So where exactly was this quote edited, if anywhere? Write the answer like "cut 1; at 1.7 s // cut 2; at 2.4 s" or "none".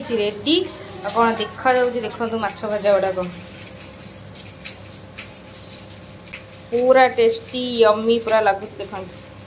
cut 1; at 6.3 s